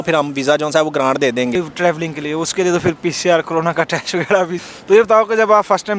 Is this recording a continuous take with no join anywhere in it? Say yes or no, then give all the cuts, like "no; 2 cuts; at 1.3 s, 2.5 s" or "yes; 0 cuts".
no; 2 cuts; at 1.5 s, 4.6 s